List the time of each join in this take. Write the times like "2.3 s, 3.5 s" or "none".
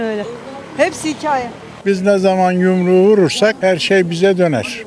1.7 s